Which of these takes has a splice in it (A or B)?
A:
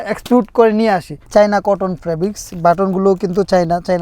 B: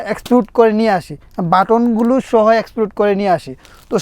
A